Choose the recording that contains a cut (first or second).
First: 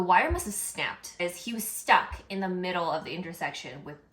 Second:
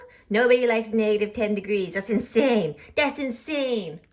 first